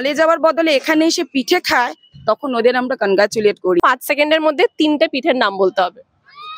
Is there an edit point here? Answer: yes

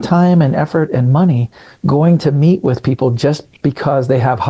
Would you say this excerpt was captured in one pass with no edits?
yes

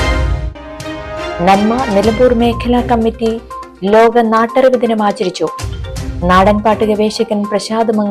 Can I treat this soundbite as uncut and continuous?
yes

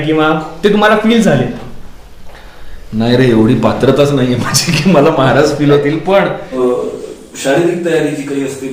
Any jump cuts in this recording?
yes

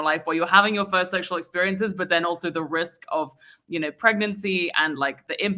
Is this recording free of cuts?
yes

